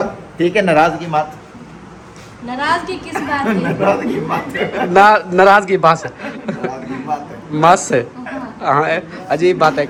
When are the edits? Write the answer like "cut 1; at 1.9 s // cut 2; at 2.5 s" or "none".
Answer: none

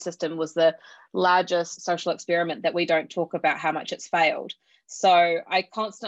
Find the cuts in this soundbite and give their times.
cut 1; at 1.8 s

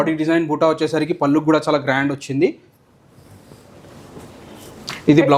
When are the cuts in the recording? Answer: none

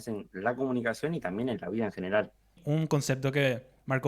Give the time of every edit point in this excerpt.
cut 1; at 2.6 s

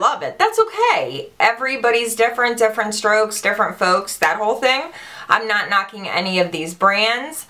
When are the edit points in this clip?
cut 1; at 5.7 s

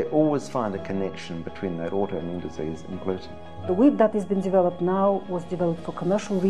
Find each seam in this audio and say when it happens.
cut 1; at 3.6 s

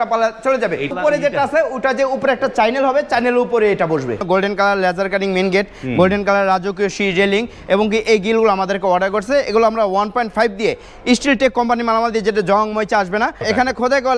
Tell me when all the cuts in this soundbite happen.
cut 1; at 0.9 s // cut 2; at 4.2 s // cut 3; at 13.4 s

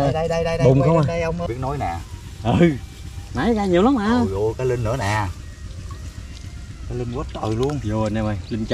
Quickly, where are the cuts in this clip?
cut 1; at 1.4 s

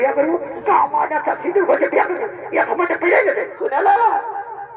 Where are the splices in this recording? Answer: cut 1; at 3.5 s

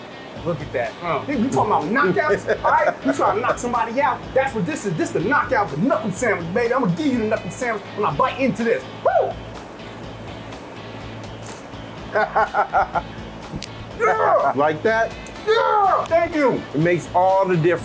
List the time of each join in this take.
cut 1; at 1.2 s

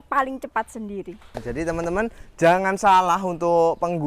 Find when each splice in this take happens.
cut 1; at 1.2 s

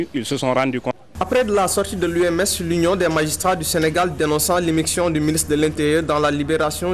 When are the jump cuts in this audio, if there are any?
cut 1; at 0.9 s

